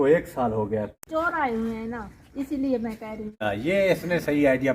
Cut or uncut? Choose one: cut